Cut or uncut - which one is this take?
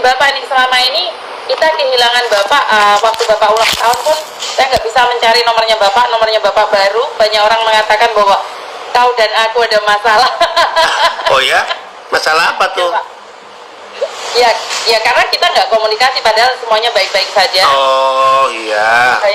uncut